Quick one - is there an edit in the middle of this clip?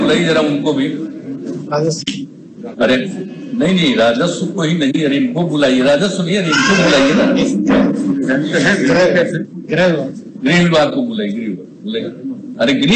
no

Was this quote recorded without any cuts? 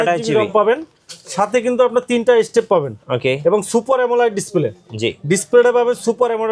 yes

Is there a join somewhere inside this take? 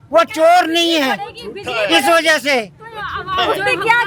no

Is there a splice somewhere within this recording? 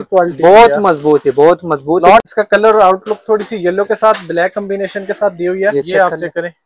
yes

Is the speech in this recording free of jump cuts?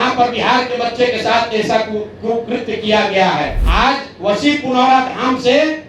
no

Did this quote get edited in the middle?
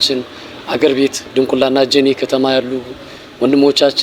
no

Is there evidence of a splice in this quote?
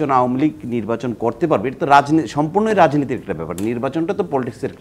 no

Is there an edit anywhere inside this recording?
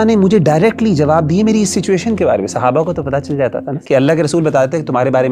yes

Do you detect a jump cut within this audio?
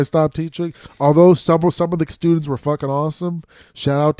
no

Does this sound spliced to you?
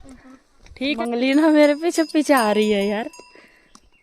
yes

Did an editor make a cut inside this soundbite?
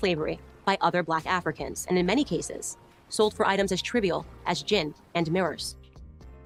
no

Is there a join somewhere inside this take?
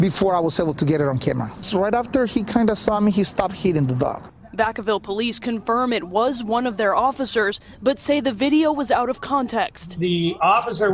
yes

